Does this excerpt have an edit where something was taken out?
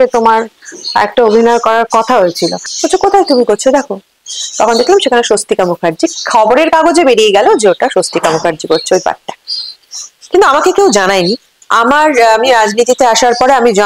yes; 2 cuts; at 2.7 s, 11.6 s

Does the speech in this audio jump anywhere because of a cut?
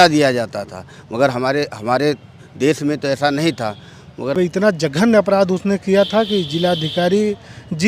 yes; 1 cut; at 4.4 s

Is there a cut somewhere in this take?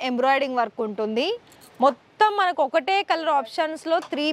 no; 0 cuts

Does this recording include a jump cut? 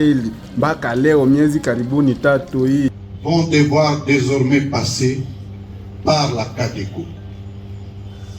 yes; 1 cut; at 3.1 s

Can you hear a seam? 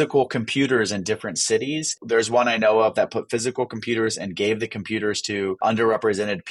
yes; 2 cuts; at 1.9 s, 5.6 s

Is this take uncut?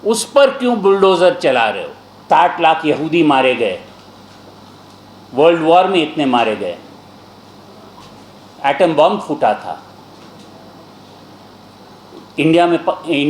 no; 1 cut; at 2.2 s

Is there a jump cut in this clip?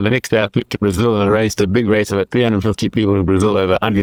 no; 0 cuts

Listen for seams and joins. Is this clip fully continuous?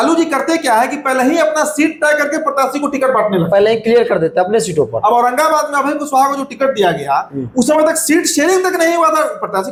yes; 0 cuts

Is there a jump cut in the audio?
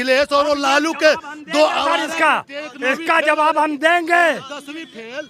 no; 0 cuts

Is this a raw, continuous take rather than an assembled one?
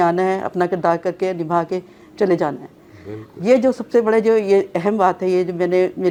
yes; 0 cuts

